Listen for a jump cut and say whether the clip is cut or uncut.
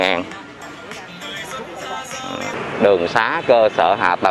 cut